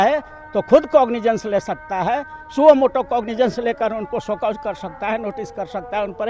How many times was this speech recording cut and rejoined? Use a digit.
0